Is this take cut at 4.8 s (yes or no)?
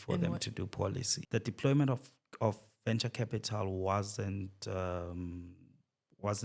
no